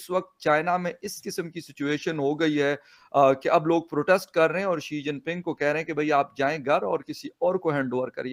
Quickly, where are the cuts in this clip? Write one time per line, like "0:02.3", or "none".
none

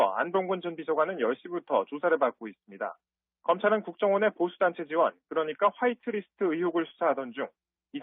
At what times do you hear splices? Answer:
none

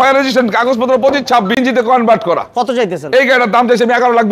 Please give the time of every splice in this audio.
0:01.6

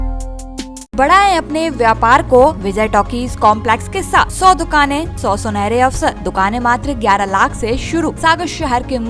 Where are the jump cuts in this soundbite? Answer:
0:00.9
0:02.6
0:04.3
0:05.1
0:06.2
0:08.2

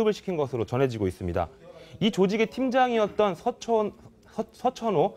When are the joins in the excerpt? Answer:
none

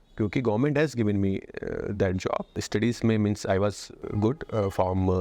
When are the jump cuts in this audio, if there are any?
0:02.6
0:04.0

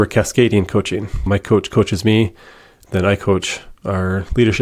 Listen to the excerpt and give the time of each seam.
0:01.2

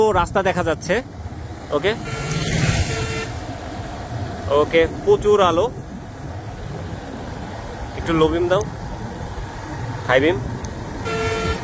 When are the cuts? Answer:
none

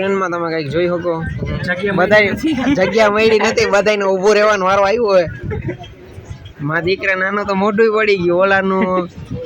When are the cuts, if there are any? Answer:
0:08.4

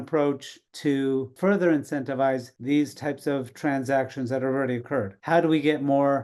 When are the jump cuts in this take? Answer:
0:05.2

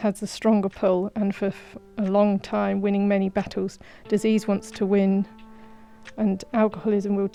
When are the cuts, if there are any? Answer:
none

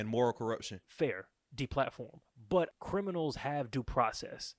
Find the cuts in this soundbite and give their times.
0:00.9
0:02.8

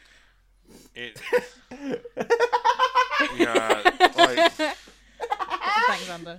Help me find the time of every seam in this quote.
0:04.7

